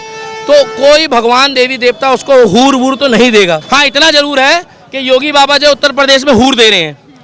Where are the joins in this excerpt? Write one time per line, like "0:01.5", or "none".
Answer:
0:03.6

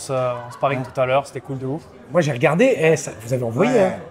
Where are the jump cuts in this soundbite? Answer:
none

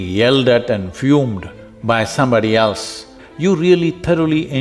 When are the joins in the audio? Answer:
0:03.1

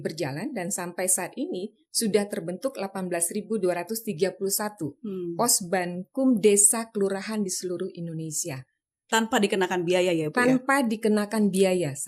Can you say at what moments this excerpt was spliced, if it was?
none

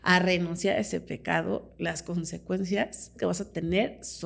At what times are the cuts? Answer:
0:01.7
0:03.1

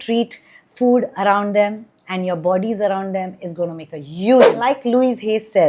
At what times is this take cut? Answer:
0:04.5

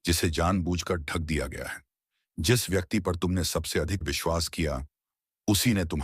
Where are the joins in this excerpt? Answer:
0:04.0

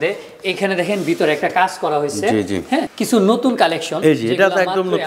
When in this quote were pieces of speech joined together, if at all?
0:02.9

